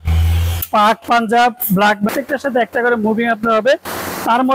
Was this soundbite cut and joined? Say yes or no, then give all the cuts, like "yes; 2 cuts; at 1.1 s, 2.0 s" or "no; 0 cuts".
yes; 1 cut; at 2.1 s